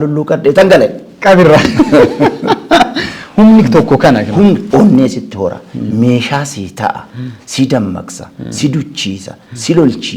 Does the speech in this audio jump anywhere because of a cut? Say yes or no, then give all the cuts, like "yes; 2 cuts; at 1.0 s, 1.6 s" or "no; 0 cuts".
yes; 1 cut; at 4.6 s